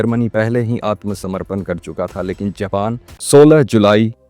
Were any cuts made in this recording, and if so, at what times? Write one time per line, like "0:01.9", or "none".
0:03.2

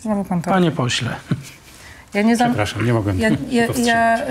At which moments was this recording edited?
none

